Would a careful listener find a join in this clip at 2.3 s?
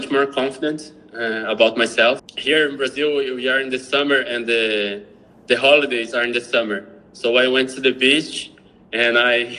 yes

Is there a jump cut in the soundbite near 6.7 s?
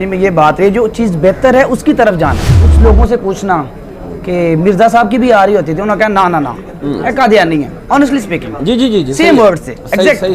no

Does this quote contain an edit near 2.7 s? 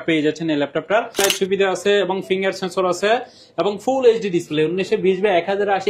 no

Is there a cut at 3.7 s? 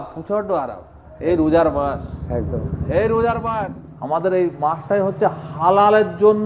yes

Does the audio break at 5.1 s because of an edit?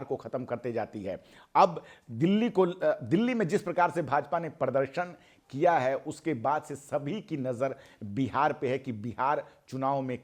no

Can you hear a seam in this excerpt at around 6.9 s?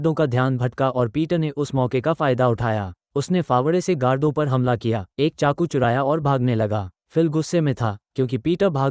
yes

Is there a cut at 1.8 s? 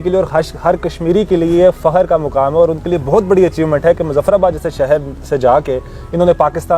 no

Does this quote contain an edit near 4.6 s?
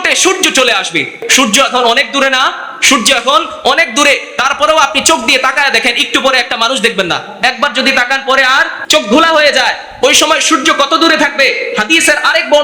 no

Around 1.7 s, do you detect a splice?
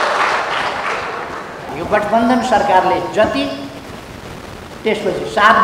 yes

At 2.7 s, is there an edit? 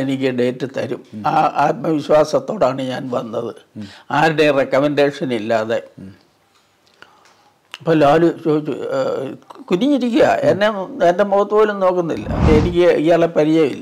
no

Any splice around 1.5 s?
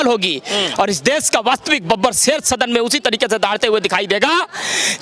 no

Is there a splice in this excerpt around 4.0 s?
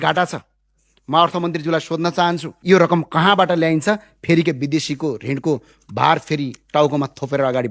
no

